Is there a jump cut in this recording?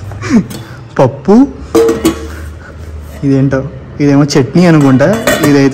no; 0 cuts

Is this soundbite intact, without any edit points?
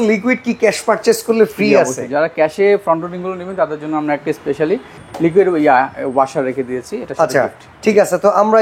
yes; 0 cuts

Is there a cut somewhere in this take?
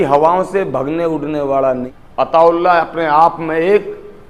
yes; 1 cut; at 1.8 s

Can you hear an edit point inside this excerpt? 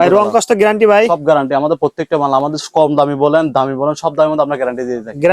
no; 0 cuts

